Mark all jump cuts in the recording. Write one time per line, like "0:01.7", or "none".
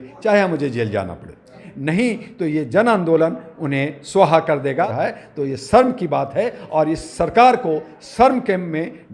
0:01.7
0:04.9